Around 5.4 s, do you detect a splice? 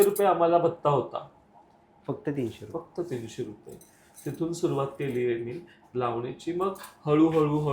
no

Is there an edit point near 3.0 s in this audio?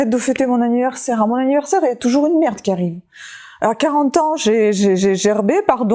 no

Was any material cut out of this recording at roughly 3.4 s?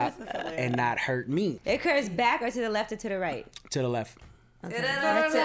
no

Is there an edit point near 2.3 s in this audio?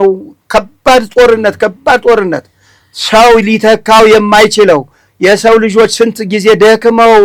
no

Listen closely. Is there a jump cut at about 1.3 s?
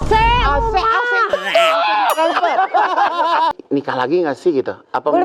yes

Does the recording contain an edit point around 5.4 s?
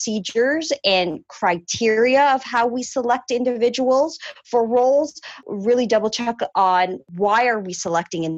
yes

